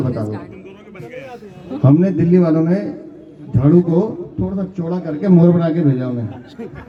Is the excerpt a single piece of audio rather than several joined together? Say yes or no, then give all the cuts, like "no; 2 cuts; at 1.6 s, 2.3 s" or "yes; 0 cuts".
yes; 0 cuts